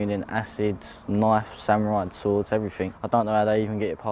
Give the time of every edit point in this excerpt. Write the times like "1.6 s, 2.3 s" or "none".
0.9 s, 2.9 s